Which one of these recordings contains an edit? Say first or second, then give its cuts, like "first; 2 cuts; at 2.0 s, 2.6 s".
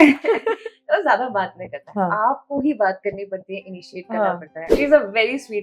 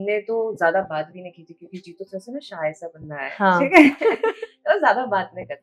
first; 1 cut; at 4.7 s